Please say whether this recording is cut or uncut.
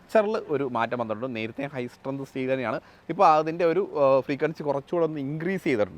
uncut